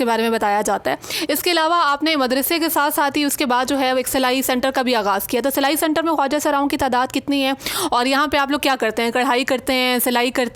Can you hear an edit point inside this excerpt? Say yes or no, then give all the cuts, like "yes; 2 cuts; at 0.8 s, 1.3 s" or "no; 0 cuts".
no; 0 cuts